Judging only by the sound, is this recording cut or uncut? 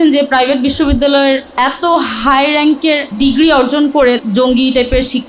cut